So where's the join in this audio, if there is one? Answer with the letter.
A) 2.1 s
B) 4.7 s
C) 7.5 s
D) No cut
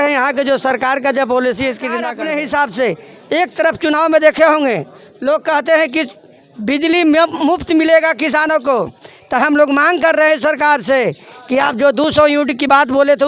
A